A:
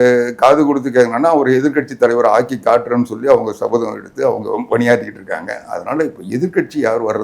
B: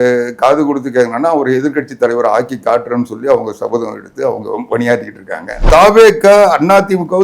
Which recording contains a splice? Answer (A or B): B